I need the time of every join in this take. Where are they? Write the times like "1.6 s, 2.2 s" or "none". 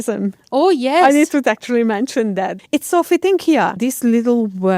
2.6 s, 3.7 s